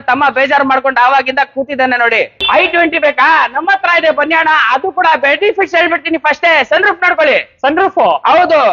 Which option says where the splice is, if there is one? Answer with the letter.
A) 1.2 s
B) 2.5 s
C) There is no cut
B